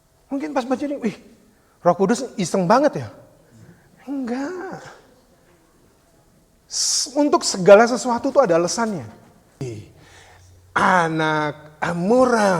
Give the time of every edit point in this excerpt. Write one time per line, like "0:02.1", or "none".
0:09.6